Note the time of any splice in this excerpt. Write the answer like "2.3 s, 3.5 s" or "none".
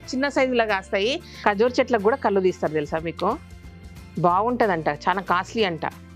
1.3 s